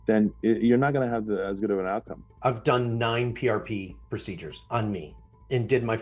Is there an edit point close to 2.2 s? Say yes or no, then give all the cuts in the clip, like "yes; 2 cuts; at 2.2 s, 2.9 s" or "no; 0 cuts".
no; 0 cuts